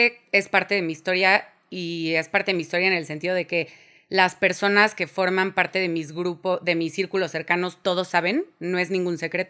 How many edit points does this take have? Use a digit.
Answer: 0